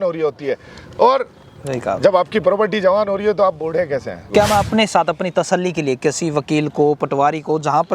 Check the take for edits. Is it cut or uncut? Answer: cut